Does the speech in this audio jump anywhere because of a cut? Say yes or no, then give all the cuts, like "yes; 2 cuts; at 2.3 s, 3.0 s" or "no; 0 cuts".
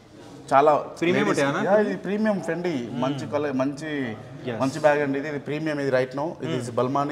no; 0 cuts